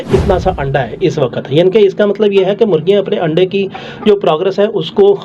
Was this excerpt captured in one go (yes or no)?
yes